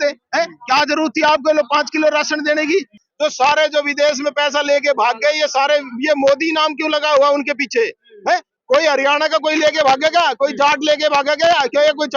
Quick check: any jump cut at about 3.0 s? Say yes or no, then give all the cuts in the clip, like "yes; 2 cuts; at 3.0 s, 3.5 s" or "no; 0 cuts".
yes; 1 cut; at 3.0 s